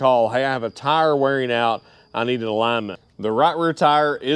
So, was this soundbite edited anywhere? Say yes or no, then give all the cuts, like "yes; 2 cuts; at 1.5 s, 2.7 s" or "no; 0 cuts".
yes; 1 cut; at 3.0 s